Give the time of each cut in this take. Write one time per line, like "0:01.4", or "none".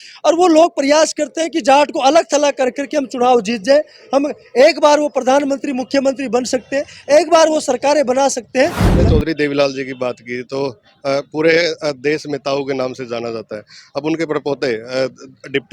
0:08.8